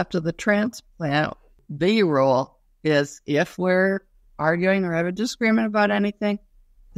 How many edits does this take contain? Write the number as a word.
one